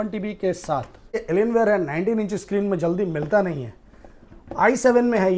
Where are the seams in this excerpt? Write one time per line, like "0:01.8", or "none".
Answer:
0:01.2